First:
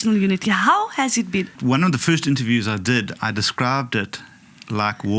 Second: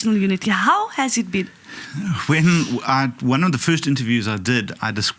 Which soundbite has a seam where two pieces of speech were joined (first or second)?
first